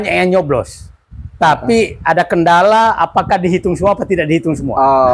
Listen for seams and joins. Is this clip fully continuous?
yes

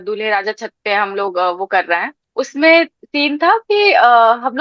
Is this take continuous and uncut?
no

